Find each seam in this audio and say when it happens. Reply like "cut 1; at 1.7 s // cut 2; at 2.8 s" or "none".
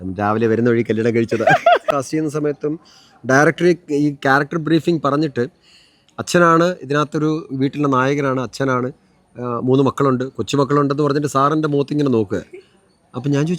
cut 1; at 1.8 s